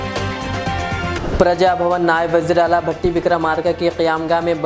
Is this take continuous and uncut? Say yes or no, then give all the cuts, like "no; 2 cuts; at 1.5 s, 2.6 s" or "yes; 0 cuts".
no; 1 cut; at 1.2 s